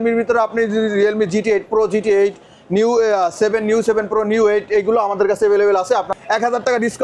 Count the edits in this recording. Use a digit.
1